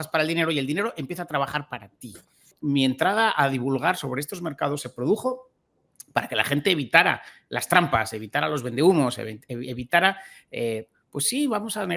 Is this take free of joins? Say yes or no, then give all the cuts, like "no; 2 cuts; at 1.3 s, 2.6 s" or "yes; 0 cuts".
no; 1 cut; at 2.5 s